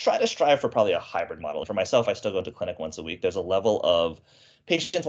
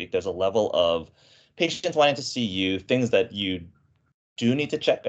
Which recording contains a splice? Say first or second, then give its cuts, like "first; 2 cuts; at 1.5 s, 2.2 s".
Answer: first; 1 cut; at 1.6 s